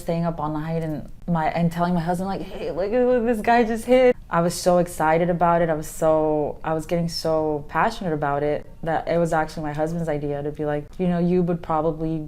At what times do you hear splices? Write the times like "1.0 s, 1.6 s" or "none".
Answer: 1.1 s, 4.1 s, 10.9 s